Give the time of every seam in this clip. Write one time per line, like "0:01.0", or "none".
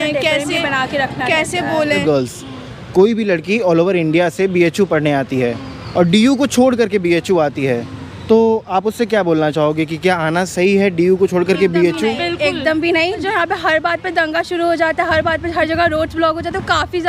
0:02.0
0:13.2

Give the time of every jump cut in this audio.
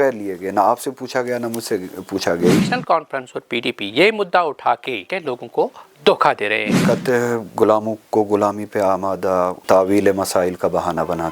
0:02.6
0:05.1
0:06.8
0:09.6

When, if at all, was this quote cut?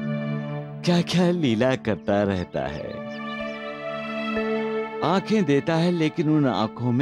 none

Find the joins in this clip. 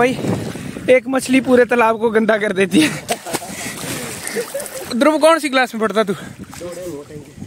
none

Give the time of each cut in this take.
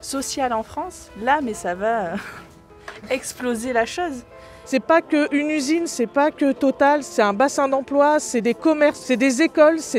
0:04.5
0:07.1
0:09.0

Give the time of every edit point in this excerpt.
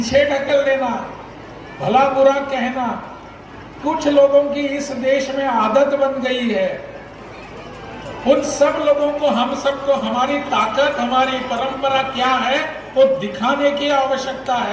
none

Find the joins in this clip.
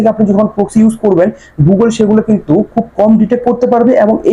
none

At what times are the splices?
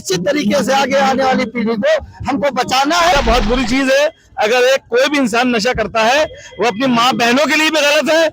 0:03.1

